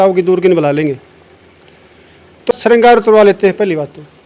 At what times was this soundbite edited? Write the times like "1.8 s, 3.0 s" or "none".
2.5 s